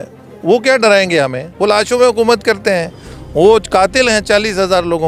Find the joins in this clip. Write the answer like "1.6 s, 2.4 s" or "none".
none